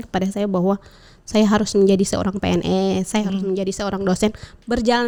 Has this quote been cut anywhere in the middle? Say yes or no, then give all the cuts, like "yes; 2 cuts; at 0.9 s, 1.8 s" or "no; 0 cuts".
no; 0 cuts